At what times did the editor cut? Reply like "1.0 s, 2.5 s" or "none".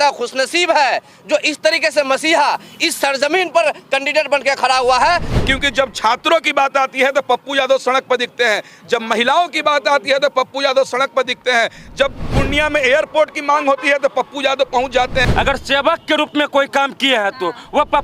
5.3 s, 12.2 s, 15.3 s